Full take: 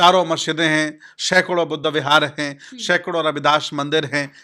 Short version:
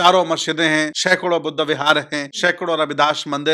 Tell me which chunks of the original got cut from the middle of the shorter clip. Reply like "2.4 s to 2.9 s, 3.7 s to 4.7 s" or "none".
1.0 s to 1.2 s, 2.5 s to 2.7 s